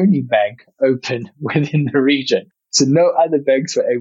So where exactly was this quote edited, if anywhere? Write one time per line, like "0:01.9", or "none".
none

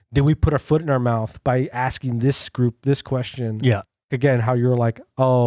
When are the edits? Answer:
0:04.1

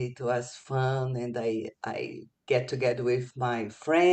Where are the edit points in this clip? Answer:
none

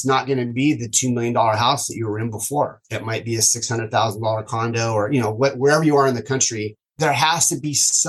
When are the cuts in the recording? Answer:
0:07.0

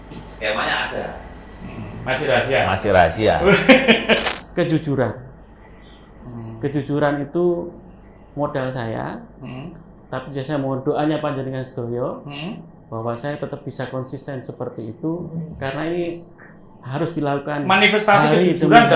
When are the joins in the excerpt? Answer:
0:04.2

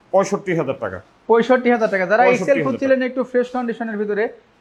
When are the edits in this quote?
none

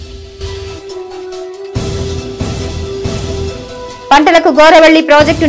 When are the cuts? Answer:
0:02.5

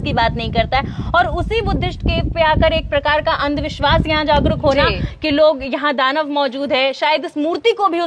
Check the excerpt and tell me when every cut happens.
none

